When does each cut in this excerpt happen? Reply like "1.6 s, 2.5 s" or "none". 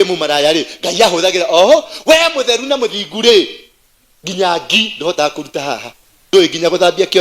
6.3 s

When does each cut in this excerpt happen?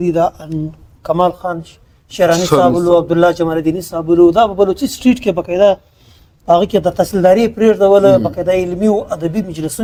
none

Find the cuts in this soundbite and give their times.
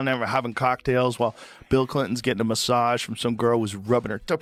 none

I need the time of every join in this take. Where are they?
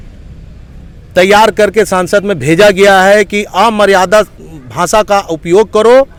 none

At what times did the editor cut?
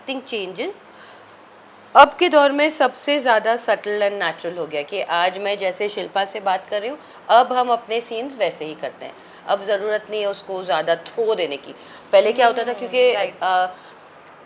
none

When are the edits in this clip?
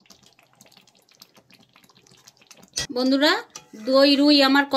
2.9 s

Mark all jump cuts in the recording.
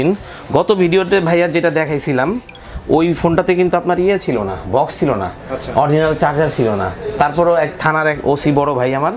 none

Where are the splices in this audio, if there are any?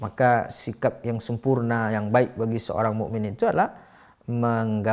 none

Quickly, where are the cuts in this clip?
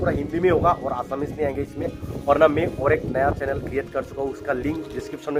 none

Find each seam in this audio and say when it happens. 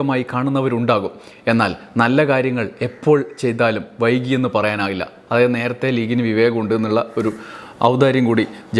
none

